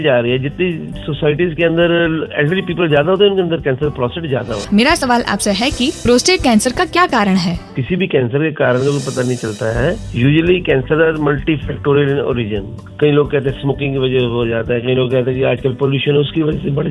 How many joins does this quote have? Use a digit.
1